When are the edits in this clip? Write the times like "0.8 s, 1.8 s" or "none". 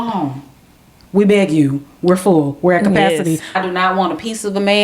3.6 s